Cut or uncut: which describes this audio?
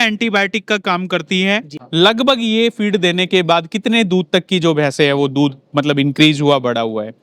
cut